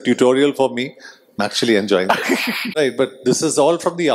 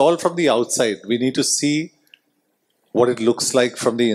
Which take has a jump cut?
first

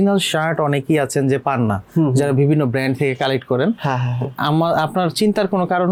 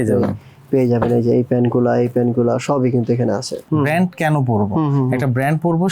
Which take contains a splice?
second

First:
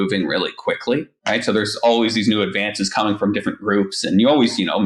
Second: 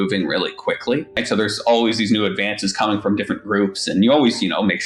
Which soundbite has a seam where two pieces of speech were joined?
second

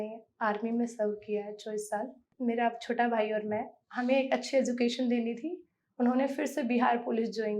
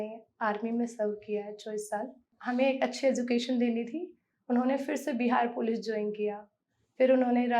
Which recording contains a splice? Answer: second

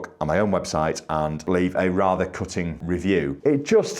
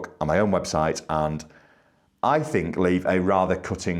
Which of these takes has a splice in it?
first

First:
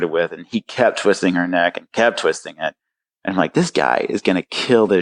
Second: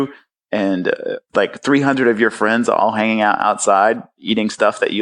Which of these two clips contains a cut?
second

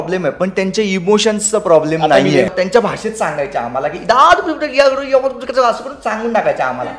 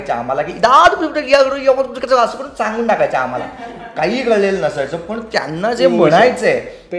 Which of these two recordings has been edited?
first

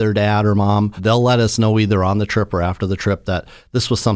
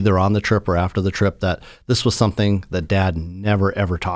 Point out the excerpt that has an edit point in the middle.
first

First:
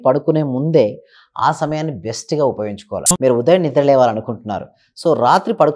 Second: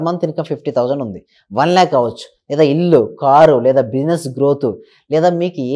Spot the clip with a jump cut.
first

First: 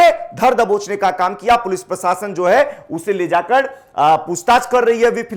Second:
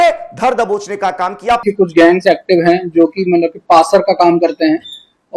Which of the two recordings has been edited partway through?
second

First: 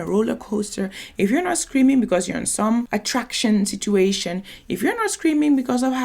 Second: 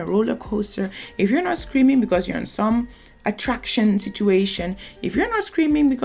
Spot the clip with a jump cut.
first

